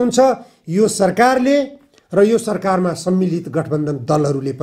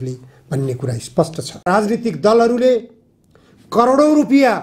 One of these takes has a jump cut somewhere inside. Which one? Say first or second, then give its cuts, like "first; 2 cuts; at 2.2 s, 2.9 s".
second; 1 cut; at 1.7 s